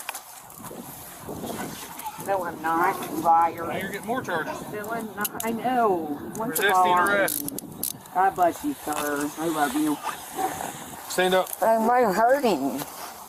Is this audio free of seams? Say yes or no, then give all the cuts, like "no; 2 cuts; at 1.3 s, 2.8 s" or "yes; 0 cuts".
yes; 0 cuts